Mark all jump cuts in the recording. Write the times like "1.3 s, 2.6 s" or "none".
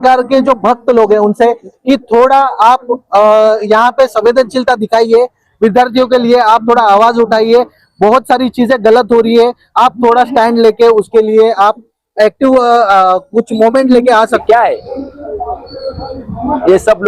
14.4 s